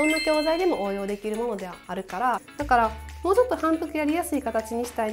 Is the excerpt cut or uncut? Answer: cut